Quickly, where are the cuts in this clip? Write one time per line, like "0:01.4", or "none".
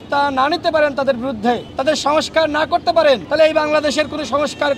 0:01.7
0:03.3